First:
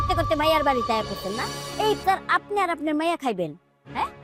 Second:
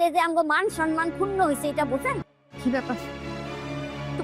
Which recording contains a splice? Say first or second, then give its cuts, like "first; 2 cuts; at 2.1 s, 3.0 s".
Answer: second; 1 cut; at 2.3 s